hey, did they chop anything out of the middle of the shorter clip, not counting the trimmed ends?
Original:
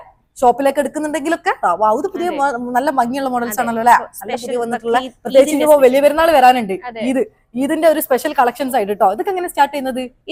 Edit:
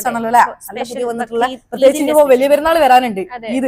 no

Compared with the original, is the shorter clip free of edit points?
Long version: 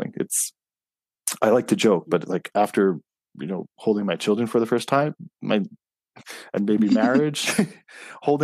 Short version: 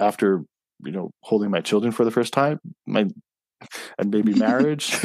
yes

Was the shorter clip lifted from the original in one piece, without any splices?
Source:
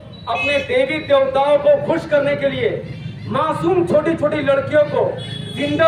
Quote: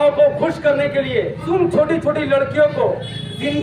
no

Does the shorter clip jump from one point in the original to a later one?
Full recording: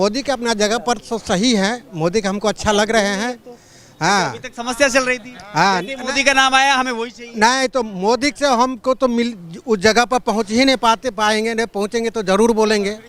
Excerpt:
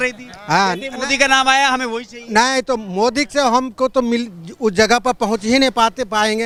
no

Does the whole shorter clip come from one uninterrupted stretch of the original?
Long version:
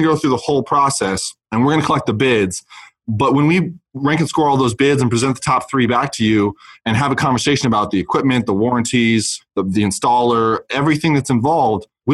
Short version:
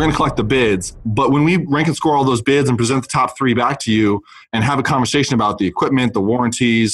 no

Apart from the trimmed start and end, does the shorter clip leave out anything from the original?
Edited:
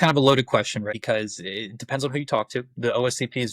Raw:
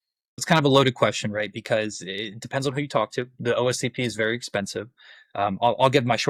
yes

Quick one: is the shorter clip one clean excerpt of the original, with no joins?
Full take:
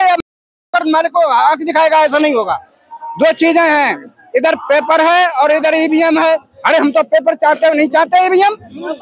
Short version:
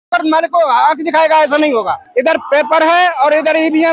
no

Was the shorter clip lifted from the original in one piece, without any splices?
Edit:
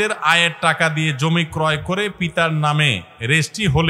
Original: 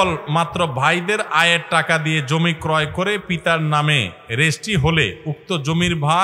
yes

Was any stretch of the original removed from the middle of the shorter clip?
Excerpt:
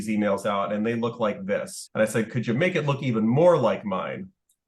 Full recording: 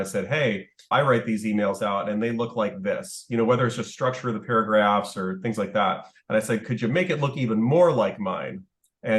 yes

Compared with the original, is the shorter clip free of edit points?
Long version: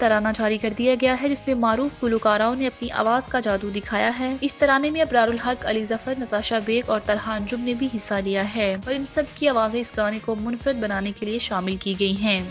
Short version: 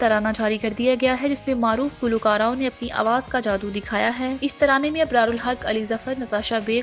yes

